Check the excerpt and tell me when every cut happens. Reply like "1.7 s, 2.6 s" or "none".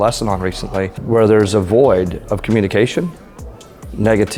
1.0 s